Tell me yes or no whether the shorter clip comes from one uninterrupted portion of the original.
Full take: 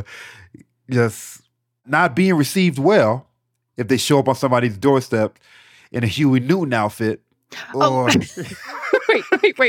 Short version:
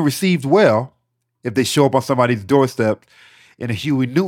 yes